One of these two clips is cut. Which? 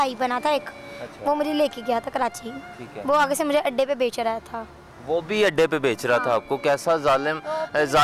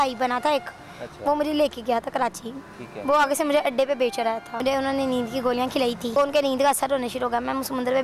second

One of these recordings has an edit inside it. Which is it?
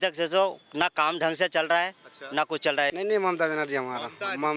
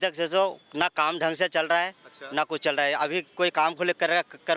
first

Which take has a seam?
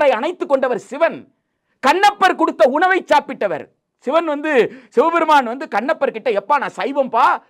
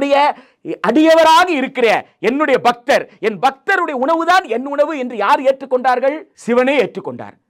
second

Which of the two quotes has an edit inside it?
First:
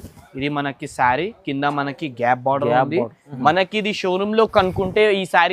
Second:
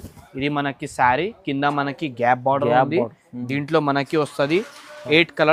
first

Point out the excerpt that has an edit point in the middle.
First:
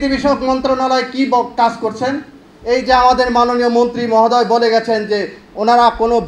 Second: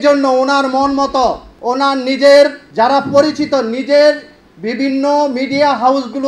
second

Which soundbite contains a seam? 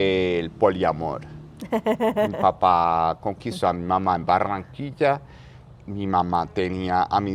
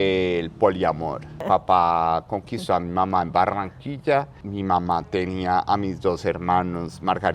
second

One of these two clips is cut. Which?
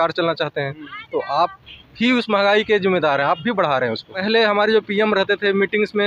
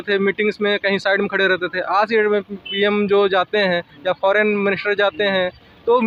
first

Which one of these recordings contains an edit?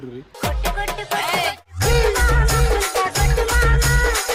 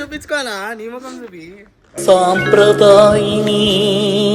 second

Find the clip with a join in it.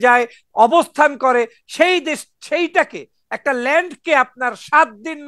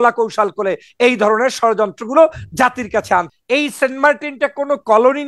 second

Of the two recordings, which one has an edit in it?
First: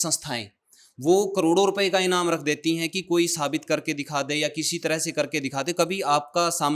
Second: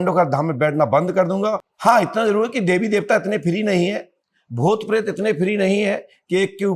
second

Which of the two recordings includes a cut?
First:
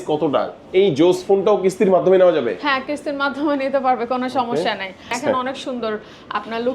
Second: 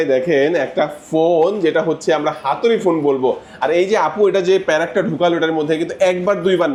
first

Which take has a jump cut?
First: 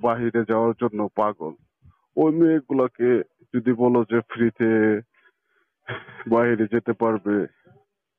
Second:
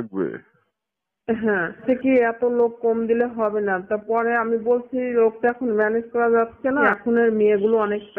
second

